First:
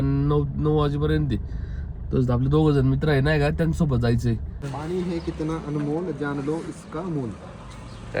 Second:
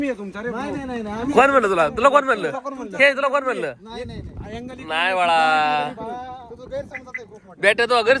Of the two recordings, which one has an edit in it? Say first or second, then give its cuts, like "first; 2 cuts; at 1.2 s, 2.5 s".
first; 1 cut; at 4.6 s